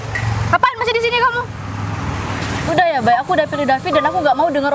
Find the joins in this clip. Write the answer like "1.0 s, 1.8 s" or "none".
2.7 s